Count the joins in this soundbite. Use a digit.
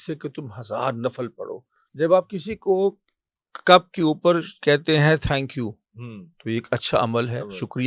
1